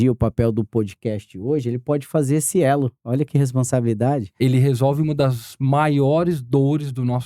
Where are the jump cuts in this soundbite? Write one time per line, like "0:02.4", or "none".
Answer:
0:04.4